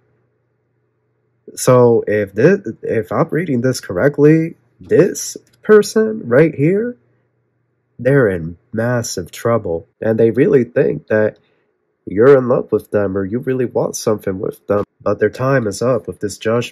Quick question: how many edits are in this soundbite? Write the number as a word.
two